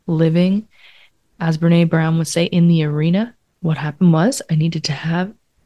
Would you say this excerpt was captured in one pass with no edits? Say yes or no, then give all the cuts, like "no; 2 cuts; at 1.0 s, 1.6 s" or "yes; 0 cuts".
no; 1 cut; at 3.5 s